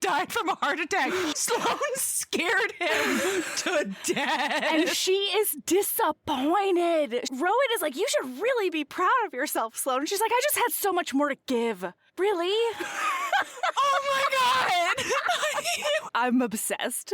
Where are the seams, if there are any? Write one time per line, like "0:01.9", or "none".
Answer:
0:01.4
0:07.2
0:16.0